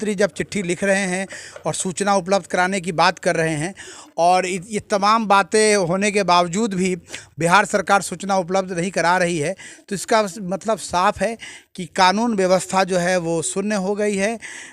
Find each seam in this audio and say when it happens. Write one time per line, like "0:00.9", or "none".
none